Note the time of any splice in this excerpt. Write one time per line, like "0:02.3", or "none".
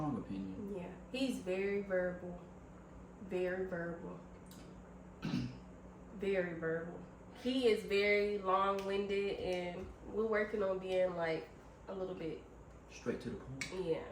0:07.4